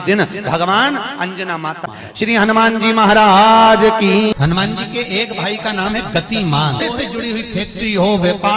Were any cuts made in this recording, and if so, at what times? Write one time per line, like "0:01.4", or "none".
0:01.9
0:04.3
0:06.8